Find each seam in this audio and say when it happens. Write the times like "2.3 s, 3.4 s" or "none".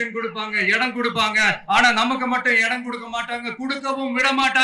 none